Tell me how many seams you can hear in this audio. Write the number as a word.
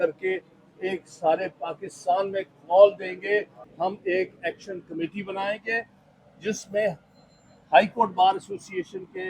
one